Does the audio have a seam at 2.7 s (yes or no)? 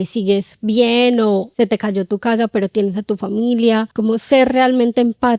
no